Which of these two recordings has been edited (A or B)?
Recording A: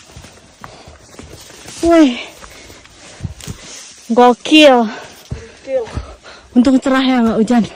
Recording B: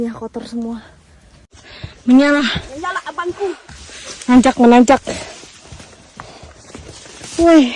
B